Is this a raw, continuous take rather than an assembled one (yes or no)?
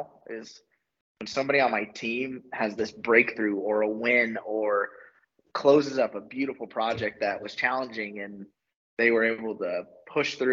yes